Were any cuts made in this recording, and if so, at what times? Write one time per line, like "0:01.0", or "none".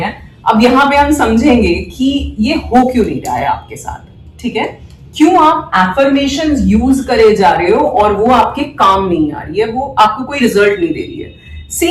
none